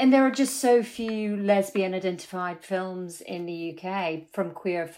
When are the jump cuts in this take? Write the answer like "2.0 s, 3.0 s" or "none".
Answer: none